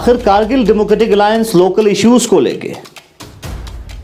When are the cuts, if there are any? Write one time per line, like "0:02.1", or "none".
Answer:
none